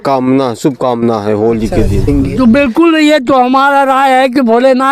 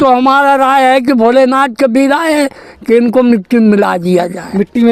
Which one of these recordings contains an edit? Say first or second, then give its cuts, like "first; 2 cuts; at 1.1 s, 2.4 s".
first; 1 cut; at 2.0 s